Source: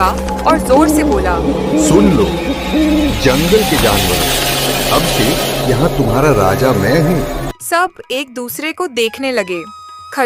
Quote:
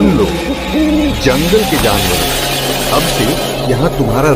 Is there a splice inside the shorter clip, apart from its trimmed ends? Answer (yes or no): no